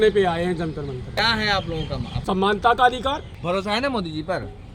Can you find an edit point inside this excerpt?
yes; 3 cuts; at 1.2 s, 2.1 s, 3.3 s

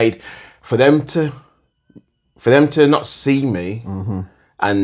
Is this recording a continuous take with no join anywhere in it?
yes; 0 cuts

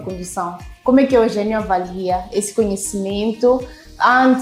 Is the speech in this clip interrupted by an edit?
no; 0 cuts

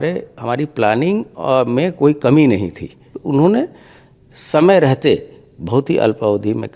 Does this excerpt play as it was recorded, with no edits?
no; 1 cut; at 3.1 s

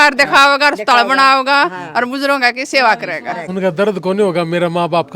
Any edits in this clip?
yes; 1 cut; at 3.4 s

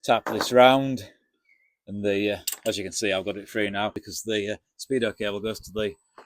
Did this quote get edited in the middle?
yes; 1 cut; at 4.1 s

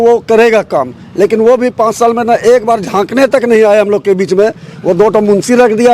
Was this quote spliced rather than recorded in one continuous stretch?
no; 0 cuts

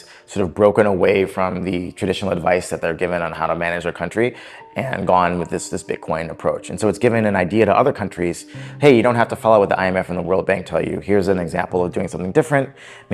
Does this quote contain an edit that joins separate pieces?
no; 0 cuts

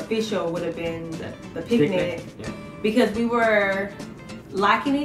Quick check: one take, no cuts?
yes; 0 cuts

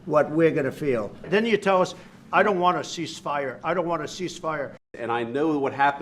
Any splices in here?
yes; 2 cuts; at 1.3 s, 4.9 s

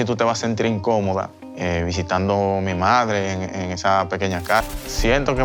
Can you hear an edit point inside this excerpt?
no; 0 cuts

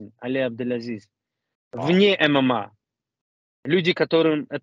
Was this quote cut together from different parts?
no; 0 cuts

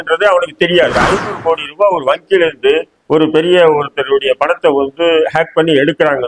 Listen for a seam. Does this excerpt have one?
yes; 1 cut; at 1.0 s

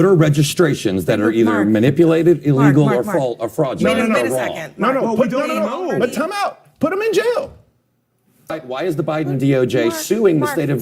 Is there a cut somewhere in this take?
yes; 1 cut; at 8.5 s

